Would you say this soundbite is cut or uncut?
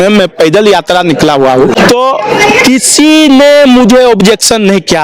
cut